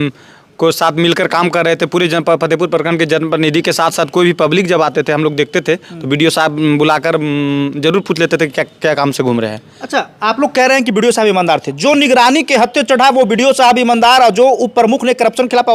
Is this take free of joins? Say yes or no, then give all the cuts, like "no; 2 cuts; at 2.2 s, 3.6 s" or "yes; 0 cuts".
yes; 0 cuts